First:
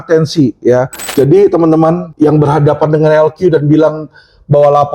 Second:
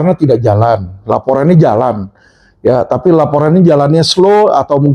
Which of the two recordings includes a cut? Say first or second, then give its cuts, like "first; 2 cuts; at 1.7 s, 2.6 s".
first; 2 cuts; at 1.0 s, 2.1 s